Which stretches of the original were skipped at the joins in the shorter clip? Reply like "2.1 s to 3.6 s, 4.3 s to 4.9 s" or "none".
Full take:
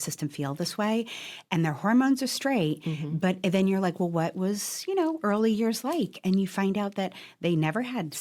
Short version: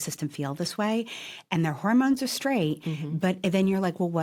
none

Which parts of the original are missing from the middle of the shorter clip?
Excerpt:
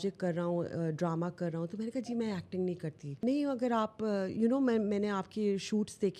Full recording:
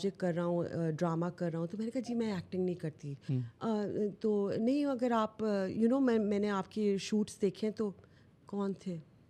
3.2 s to 4.6 s

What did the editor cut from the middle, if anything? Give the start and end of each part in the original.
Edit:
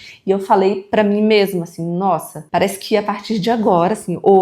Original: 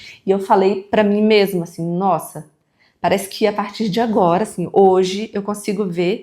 2.4 s to 2.9 s

